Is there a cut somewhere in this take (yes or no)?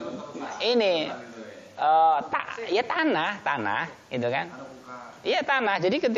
no